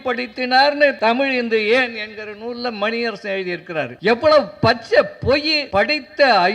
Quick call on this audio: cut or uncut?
cut